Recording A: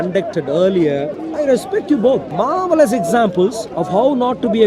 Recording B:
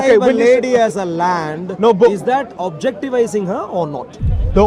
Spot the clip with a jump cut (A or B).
A